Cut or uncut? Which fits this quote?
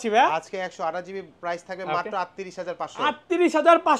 uncut